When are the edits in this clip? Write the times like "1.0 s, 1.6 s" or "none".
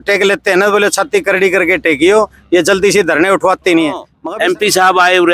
4.1 s